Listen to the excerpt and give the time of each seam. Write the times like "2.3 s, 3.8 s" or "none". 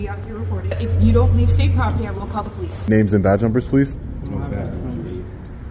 0.8 s, 2.8 s